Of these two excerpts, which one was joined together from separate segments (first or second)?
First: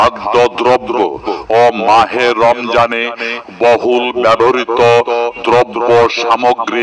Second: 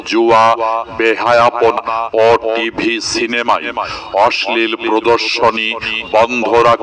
second